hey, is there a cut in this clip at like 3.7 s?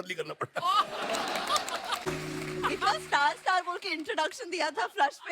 no; 1 cut; at 2.0 s

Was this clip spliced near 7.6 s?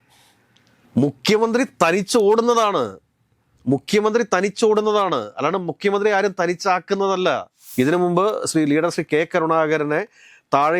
yes; 1 cut; at 7.6 s

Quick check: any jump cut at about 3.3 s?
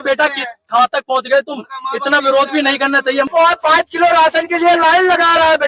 yes; 1 cut; at 3.3 s

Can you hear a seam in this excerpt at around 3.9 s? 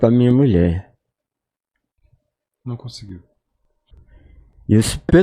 yes; 1 cut; at 3.9 s

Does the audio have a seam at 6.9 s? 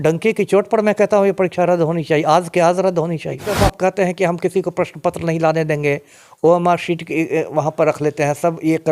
no; 1 cut; at 3.5 s

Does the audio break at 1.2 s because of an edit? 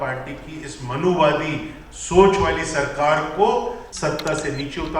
no; 1 cut; at 3.9 s

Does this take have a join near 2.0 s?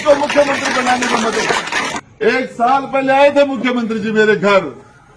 yes; 1 cut; at 2.0 s

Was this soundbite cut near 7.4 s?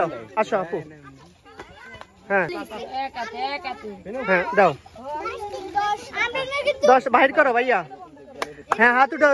no; 1 cut; at 2.6 s

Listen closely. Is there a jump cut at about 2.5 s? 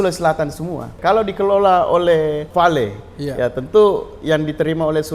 yes; 2 cuts; at 0.9 s, 2.5 s

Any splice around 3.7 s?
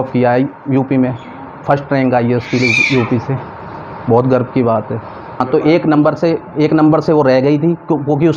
no; 1 cut; at 5.4 s

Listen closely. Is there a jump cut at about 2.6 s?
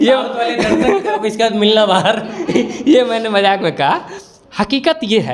no; 0 cuts

